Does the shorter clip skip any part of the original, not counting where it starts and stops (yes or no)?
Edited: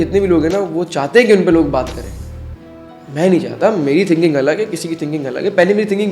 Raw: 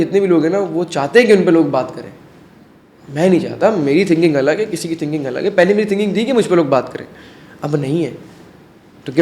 no